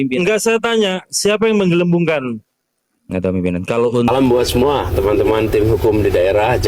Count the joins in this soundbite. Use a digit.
1